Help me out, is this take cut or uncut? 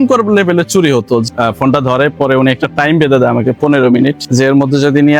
cut